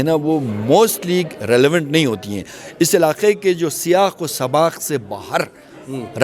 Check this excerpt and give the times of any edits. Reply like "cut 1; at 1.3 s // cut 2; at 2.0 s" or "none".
none